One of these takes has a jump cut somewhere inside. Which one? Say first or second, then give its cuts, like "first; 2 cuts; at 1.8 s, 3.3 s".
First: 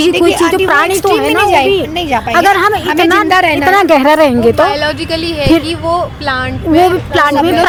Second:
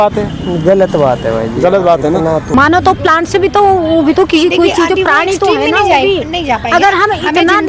second; 1 cut; at 2.5 s